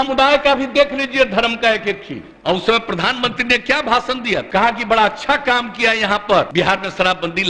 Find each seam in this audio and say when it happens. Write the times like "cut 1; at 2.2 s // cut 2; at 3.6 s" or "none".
cut 1; at 2.2 s // cut 2; at 6.5 s